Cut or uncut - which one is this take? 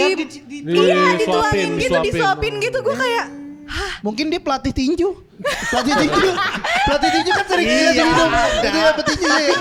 uncut